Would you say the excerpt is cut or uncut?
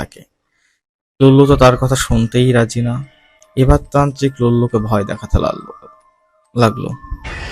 uncut